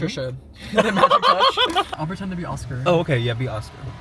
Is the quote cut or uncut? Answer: cut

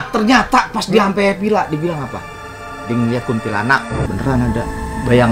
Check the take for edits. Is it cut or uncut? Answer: cut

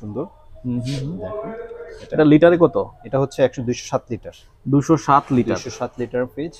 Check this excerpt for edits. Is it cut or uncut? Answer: uncut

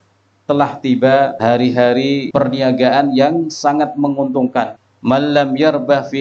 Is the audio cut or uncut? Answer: cut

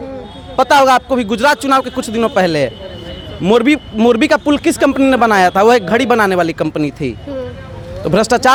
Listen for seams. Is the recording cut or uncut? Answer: uncut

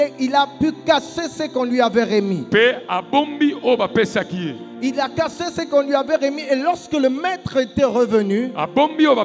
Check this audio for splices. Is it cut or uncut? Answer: uncut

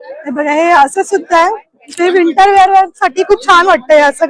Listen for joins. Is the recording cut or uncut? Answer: uncut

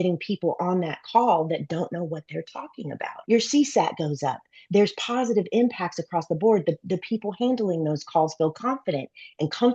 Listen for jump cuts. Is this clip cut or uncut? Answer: cut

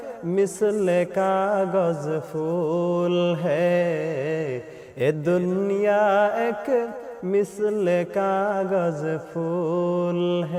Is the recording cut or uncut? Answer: uncut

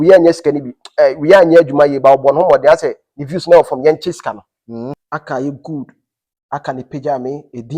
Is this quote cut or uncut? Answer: cut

